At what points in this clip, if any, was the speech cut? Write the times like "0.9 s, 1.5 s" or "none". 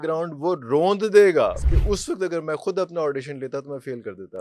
1.7 s